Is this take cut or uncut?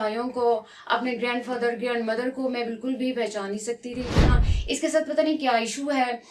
cut